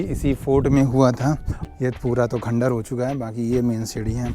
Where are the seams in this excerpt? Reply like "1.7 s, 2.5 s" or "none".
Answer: 1.5 s